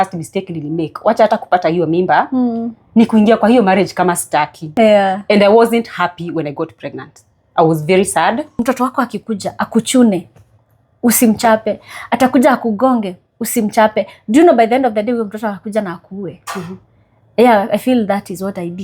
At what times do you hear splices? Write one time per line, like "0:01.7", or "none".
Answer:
0:04.7
0:08.5